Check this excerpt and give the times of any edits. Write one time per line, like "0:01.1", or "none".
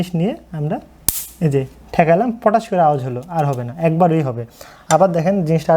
none